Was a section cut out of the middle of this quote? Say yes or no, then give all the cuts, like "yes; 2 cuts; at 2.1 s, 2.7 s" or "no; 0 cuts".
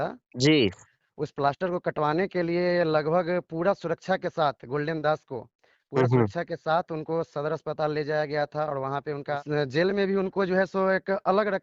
yes; 1 cut; at 9.4 s